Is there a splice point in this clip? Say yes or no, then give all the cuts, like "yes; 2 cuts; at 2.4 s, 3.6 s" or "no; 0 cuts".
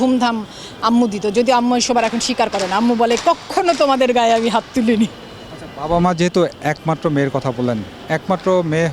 no; 0 cuts